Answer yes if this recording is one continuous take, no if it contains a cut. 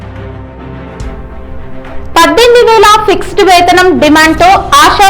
no